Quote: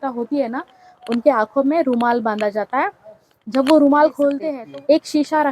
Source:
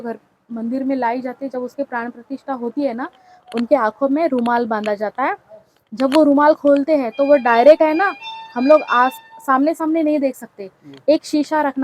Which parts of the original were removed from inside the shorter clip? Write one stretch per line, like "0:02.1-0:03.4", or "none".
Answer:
0:07.0-0:10.7